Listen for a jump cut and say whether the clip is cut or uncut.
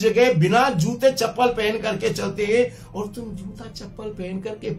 uncut